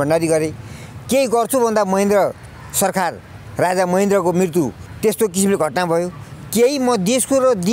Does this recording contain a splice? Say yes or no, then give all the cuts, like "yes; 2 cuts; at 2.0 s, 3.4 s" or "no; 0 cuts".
yes; 1 cut; at 4.8 s